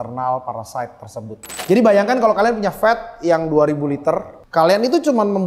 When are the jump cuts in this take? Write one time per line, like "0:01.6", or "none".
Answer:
0:01.5
0:04.4